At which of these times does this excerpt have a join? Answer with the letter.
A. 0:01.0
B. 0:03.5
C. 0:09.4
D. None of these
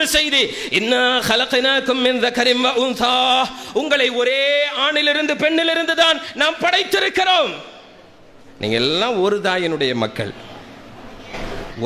D